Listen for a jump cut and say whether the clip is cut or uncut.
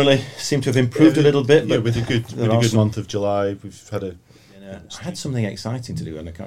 cut